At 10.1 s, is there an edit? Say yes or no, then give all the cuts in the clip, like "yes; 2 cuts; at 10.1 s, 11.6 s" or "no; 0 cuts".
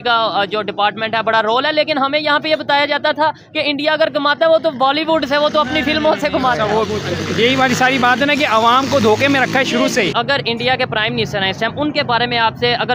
yes; 1 cut; at 10.1 s